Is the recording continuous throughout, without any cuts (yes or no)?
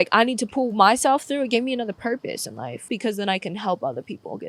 no